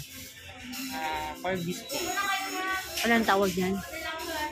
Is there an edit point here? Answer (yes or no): yes